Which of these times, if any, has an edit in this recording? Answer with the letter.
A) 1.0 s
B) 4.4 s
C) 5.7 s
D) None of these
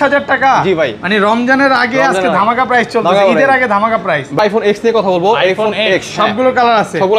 B